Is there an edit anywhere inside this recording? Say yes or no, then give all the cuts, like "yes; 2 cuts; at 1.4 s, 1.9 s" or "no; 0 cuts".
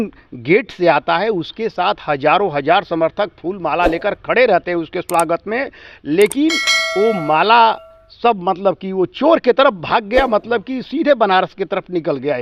no; 0 cuts